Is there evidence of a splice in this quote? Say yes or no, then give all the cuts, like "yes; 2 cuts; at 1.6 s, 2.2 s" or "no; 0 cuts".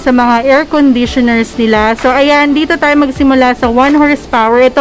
no; 0 cuts